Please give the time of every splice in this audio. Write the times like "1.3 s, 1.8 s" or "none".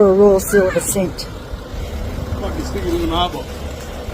1.8 s